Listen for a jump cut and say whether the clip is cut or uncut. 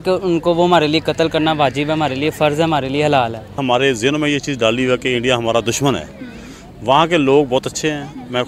cut